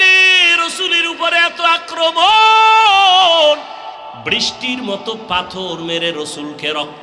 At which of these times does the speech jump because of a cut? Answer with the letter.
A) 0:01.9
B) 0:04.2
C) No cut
B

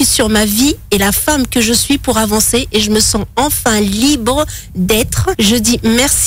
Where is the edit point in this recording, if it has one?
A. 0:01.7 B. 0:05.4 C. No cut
B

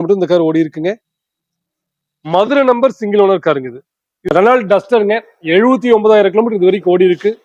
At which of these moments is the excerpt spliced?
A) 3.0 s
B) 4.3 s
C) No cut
B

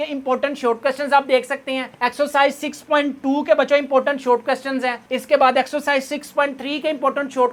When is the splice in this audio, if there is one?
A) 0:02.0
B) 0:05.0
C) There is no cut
C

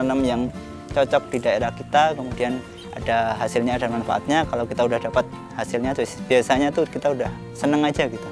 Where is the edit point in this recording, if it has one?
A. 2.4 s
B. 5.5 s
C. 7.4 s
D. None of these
C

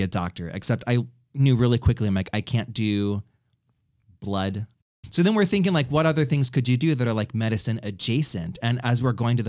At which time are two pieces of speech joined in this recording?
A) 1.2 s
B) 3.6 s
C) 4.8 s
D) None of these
C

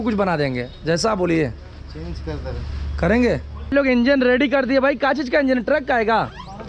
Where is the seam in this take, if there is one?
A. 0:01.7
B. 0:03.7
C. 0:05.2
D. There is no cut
B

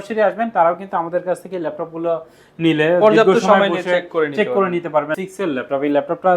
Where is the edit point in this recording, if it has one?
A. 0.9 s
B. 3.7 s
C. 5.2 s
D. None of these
C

